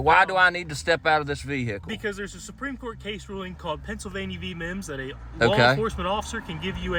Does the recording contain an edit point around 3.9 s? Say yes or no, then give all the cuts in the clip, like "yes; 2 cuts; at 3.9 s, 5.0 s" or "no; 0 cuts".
no; 0 cuts